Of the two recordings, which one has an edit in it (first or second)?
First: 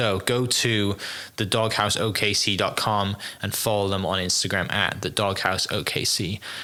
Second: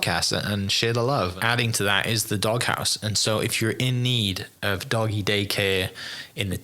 second